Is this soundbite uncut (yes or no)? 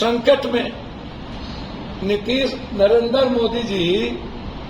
yes